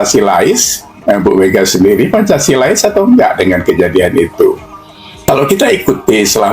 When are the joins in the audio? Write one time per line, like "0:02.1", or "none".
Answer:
0:05.1